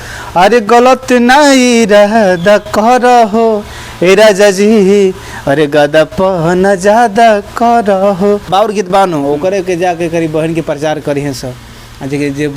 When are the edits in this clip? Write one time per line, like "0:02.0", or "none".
0:08.5